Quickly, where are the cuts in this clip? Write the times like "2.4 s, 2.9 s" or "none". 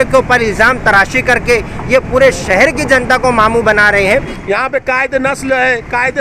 4.3 s

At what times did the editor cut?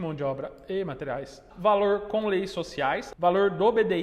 1.4 s, 3.1 s

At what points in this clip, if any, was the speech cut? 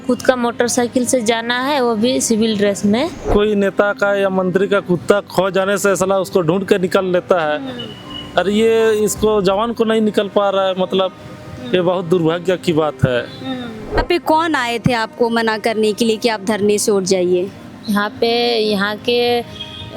3.2 s, 14.0 s

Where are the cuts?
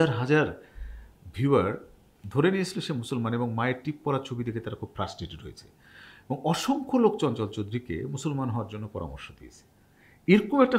2.1 s

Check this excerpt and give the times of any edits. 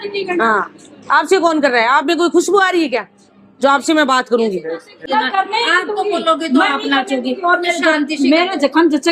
5.0 s

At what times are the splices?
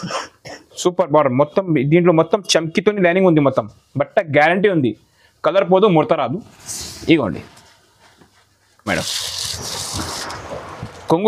8.9 s

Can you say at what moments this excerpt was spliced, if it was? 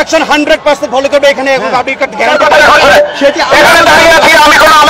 2.3 s

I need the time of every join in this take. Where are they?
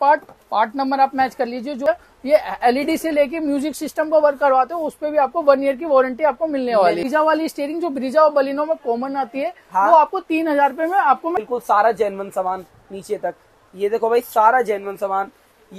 1.9 s, 7.0 s, 11.4 s

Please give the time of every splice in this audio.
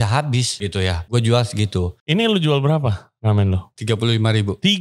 0.7 s, 2.0 s, 3.7 s

